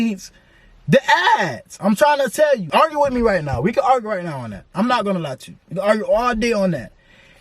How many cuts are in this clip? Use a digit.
1